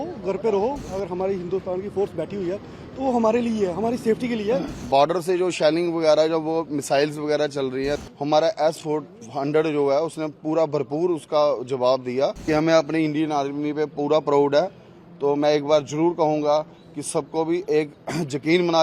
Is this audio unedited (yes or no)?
no